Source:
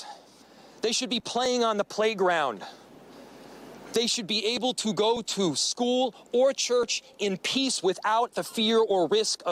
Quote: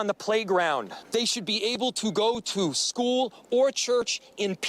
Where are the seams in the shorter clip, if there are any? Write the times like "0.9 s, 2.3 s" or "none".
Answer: 1.0 s